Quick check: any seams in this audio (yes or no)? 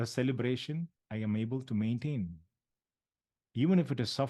yes